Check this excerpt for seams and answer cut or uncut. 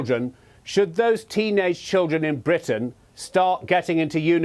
uncut